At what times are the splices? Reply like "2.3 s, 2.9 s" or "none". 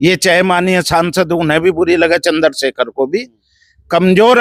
none